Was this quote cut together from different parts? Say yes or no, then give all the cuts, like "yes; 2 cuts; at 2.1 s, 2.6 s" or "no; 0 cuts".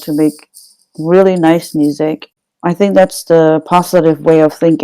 yes; 1 cut; at 2.4 s